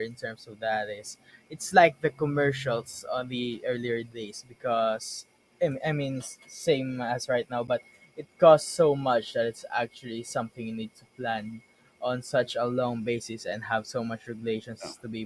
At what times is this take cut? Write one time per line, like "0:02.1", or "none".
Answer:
none